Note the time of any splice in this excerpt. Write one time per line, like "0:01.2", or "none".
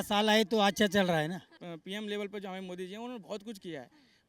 0:01.5